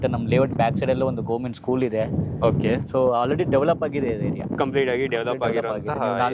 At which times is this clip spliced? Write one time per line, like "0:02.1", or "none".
none